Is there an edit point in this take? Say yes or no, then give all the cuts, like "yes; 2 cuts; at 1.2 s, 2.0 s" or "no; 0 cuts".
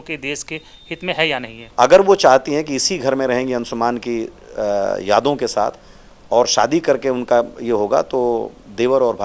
yes; 1 cut; at 1.5 s